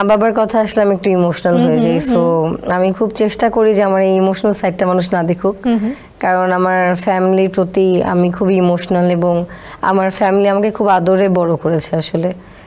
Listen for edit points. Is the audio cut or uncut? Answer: uncut